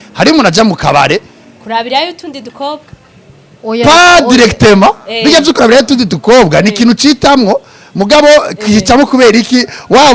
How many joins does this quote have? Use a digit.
0